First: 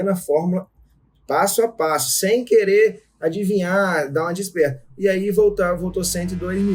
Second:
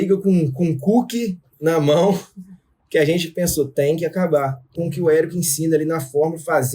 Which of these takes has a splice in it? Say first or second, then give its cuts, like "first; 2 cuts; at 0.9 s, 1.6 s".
second; 1 cut; at 4.6 s